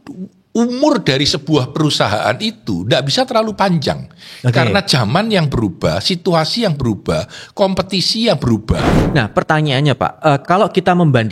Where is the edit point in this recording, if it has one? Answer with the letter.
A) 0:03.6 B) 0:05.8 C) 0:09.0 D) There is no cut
C